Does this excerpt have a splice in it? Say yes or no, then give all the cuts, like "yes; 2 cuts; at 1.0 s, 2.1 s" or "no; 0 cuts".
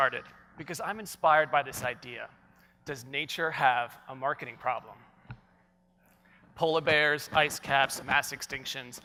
no; 0 cuts